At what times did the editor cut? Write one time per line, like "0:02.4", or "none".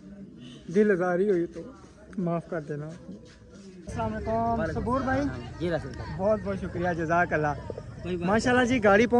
0:03.8

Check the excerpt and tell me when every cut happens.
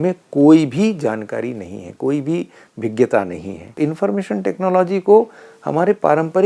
0:03.8

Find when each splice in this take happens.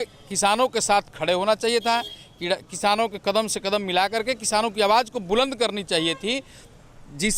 none

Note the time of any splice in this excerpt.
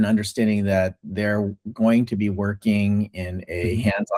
none

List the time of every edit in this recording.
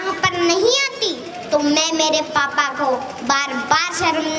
none

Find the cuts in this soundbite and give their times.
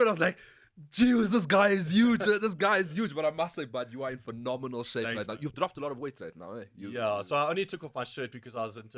none

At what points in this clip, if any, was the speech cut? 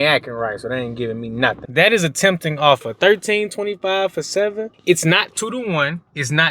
0:01.6
0:04.7

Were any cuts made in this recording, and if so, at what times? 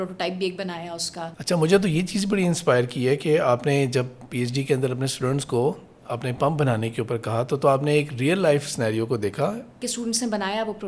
0:01.3
0:09.8

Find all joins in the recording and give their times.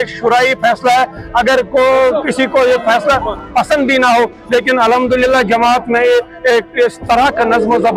none

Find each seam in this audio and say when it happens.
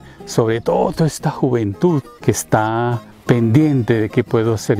0:02.1
0:03.1

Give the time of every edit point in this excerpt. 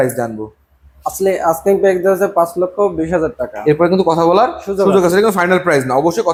none

